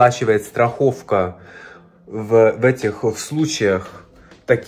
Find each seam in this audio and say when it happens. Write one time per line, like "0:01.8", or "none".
none